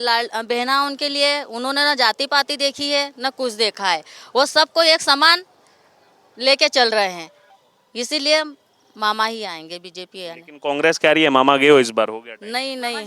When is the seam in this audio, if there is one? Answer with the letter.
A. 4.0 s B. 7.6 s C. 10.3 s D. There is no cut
D